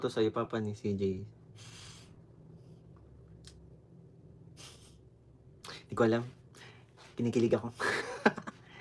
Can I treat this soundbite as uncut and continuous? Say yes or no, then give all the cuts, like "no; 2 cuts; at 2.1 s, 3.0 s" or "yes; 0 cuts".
yes; 0 cuts